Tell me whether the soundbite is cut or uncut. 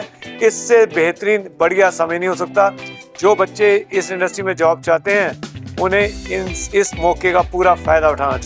uncut